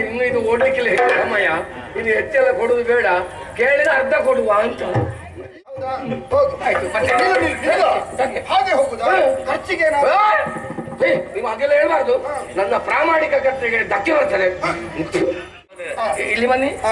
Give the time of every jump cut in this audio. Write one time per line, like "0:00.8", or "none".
0:05.3
0:15.8